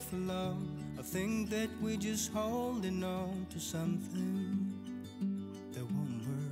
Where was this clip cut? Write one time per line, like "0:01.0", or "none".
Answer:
none